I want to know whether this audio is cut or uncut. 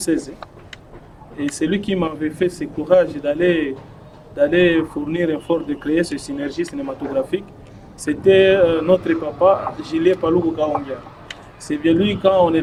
uncut